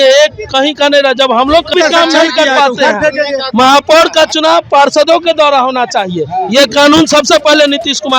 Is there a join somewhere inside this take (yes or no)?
yes